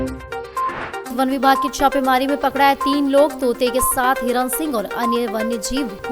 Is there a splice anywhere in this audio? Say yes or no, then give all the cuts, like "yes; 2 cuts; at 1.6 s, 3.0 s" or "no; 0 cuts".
yes; 1 cut; at 1.0 s